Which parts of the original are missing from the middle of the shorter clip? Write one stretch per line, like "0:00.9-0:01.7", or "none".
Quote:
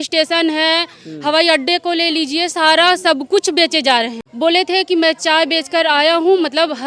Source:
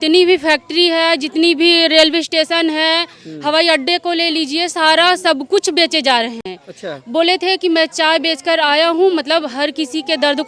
0:06.4-0:07.0

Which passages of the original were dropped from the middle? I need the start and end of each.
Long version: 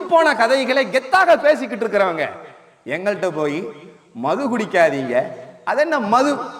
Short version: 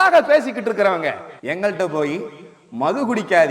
0:02.5-0:02.7

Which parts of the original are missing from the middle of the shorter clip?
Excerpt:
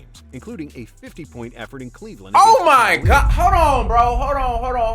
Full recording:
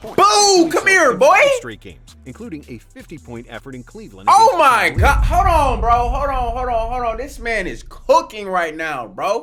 none

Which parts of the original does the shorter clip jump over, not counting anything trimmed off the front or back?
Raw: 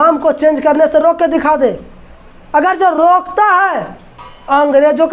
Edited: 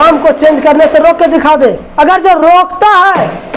0:01.8-0:02.4

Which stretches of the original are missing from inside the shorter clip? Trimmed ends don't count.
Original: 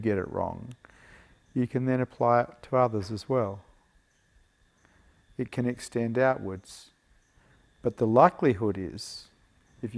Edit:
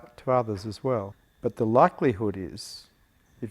0:03.7-0:07.6

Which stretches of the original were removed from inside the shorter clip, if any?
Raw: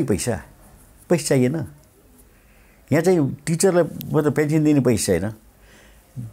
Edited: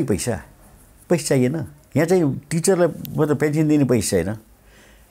0:01.7-0:02.7

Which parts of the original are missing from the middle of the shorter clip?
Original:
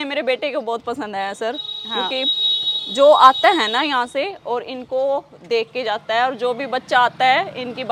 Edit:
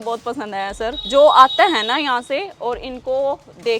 0:01.6-0:02.9

